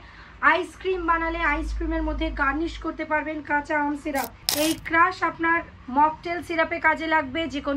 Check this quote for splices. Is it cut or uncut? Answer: cut